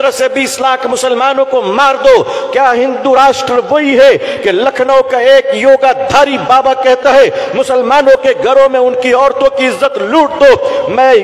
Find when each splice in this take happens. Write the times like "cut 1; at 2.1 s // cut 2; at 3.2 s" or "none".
none